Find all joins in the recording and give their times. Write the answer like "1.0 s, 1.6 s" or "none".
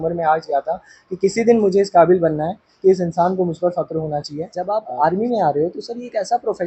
4.6 s